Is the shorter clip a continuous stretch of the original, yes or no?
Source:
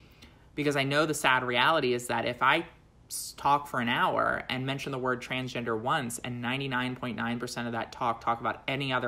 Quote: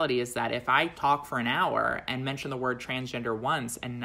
no